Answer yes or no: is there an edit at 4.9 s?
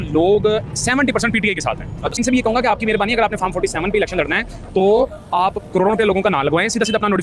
no